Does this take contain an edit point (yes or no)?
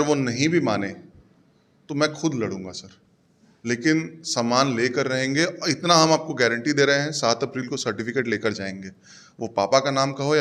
no